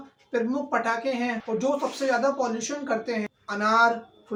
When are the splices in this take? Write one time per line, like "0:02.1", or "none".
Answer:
none